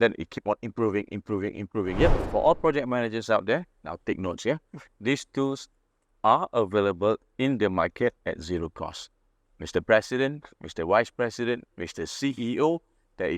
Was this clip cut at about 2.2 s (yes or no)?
yes